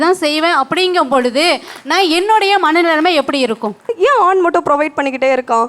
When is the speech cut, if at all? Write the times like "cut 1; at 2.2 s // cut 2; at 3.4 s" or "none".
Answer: cut 1; at 3.9 s